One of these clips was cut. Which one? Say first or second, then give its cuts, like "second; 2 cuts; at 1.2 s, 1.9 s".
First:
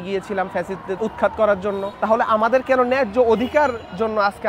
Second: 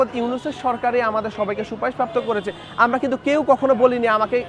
first; 2 cuts; at 1.0 s, 1.9 s